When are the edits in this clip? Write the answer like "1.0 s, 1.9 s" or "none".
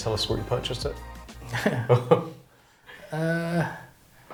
none